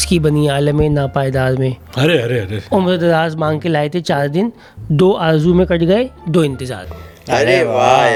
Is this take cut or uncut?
uncut